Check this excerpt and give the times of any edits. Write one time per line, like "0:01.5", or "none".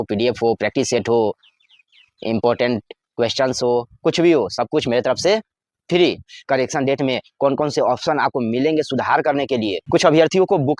0:06.3
0:09.9